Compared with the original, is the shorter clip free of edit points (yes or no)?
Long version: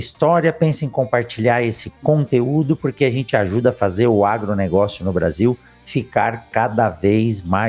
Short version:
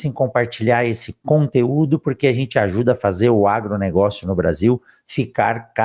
yes